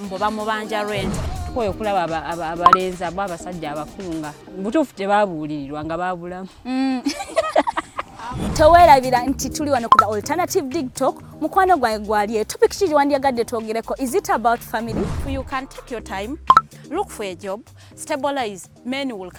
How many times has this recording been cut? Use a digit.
0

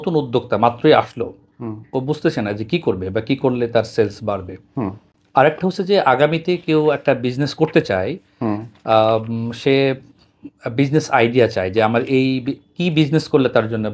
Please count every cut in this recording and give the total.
0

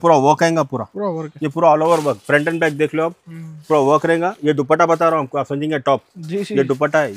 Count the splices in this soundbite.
0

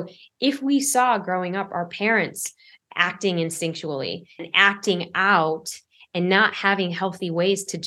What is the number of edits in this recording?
1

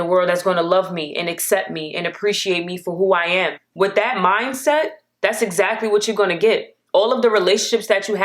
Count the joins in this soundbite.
1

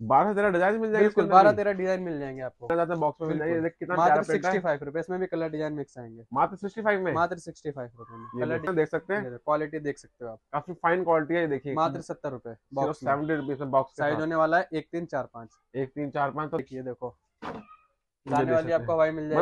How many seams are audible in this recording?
3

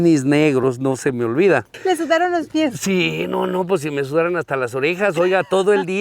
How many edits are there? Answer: 1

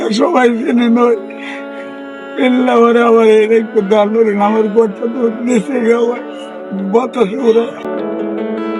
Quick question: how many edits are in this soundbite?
1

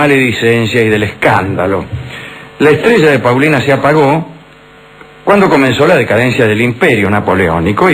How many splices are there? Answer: 1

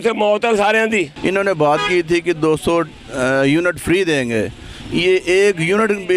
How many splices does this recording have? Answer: 1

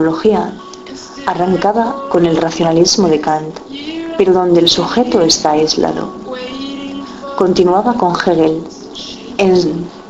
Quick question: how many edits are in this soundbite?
1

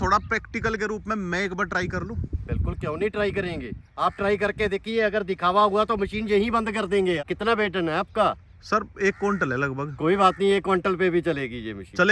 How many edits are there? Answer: 1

